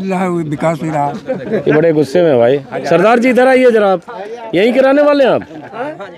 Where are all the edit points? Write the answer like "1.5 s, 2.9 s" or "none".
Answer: none